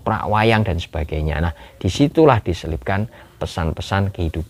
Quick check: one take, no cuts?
yes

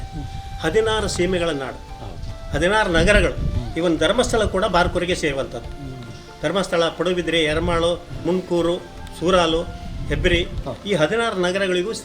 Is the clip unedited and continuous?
no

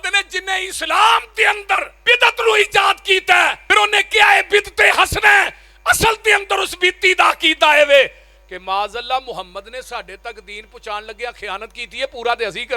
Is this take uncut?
no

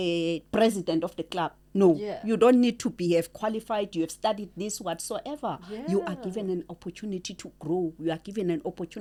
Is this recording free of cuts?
yes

